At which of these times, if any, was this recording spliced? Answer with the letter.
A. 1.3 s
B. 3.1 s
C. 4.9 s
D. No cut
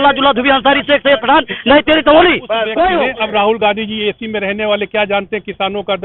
B